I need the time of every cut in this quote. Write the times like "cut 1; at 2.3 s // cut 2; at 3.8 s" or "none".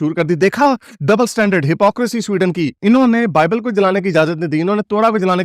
none

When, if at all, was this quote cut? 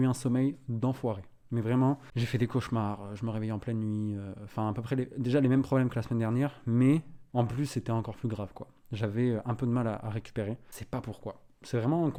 none

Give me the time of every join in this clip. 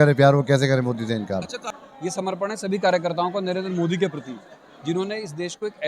cut 1; at 1.4 s

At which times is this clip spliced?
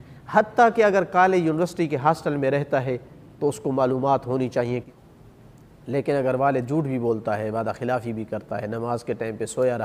cut 1; at 4.9 s

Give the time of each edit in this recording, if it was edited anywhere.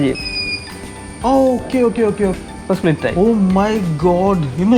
cut 1; at 2.4 s

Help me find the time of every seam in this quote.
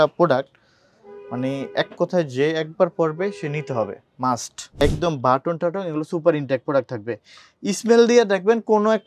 cut 1; at 4.8 s

